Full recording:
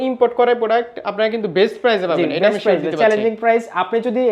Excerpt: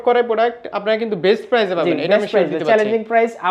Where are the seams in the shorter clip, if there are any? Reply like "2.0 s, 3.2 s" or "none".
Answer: none